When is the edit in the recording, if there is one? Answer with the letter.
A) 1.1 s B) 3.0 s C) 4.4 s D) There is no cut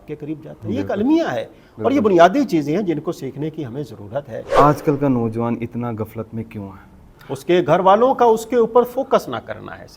C